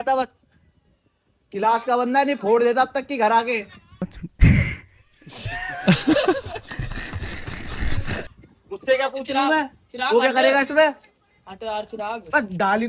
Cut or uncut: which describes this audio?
uncut